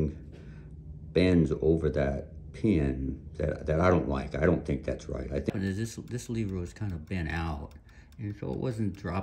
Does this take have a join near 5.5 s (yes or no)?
yes